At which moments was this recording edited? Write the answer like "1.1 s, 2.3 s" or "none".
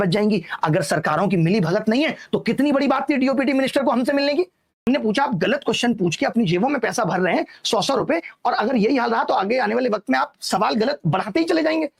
4.7 s